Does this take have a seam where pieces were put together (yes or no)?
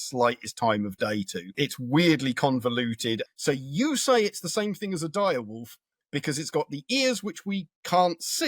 yes